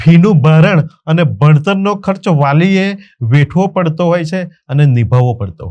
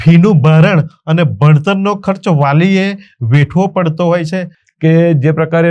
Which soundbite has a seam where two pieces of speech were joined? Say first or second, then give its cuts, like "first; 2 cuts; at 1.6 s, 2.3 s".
second; 1 cut; at 4.6 s